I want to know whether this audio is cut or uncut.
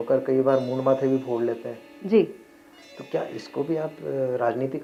uncut